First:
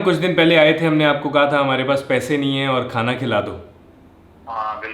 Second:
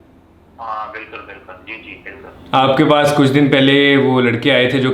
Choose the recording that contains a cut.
second; 1 cut; at 2.3 s

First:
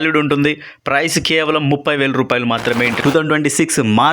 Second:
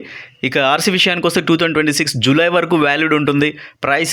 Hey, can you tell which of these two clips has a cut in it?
first; 1 cut; at 3.0 s

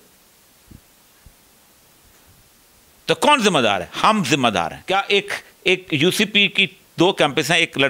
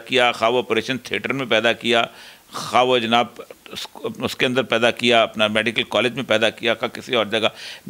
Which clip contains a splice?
first; 1 cut; at 4.8 s

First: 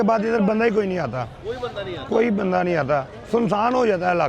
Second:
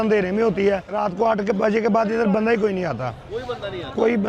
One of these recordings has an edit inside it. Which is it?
second; 1 cut; at 1.0 s

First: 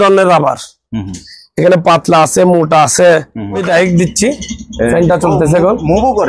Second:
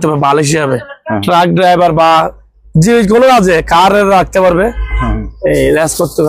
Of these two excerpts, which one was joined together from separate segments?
first; 1 cut; at 3.6 s

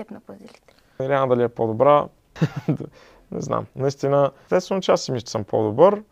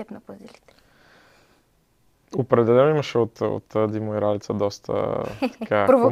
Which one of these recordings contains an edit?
first; 3 cuts; at 1.0 s, 2.2 s, 4.4 s

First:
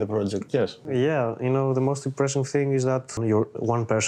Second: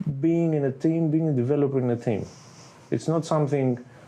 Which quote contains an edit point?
first; 2 cuts; at 0.8 s, 3.2 s

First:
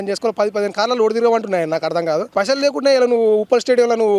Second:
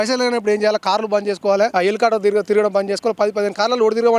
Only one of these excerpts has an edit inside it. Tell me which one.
first; 1 cut; at 2.3 s

